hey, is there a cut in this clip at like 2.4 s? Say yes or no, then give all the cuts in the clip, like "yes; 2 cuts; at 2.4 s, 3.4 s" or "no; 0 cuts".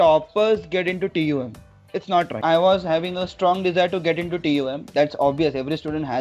yes; 1 cut; at 2.4 s